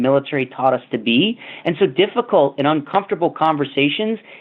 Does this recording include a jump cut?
no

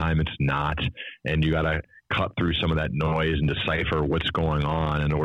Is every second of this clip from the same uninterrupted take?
no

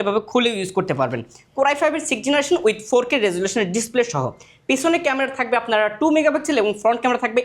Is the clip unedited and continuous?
yes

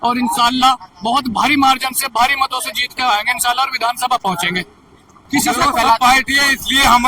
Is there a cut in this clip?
yes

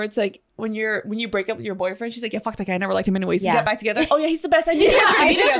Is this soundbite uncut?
yes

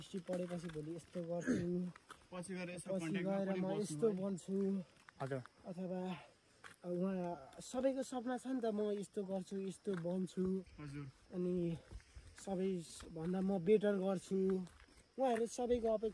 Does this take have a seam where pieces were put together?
no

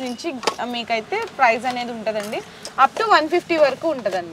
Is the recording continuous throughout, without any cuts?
yes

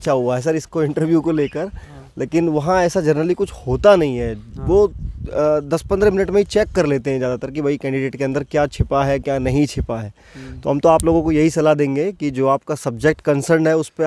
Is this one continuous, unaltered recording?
yes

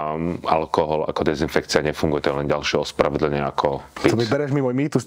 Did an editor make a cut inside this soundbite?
no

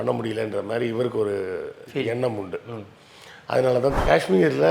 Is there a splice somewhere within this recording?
yes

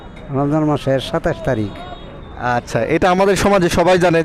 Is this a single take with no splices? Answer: yes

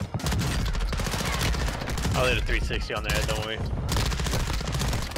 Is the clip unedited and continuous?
yes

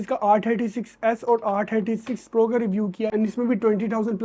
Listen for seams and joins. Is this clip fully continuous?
no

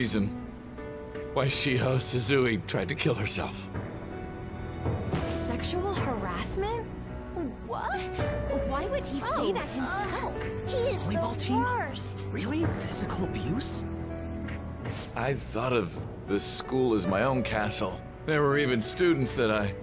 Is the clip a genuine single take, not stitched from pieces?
yes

